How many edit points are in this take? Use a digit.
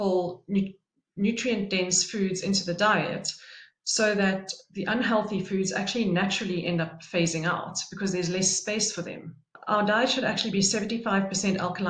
1